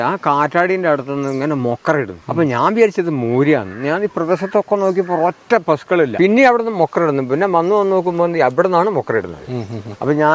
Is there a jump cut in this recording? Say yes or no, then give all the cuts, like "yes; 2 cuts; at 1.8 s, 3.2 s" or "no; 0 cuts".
yes; 2 cuts; at 2.2 s, 6.1 s